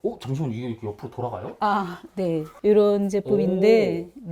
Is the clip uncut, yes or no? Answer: yes